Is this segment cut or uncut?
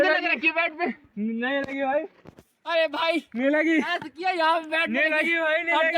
uncut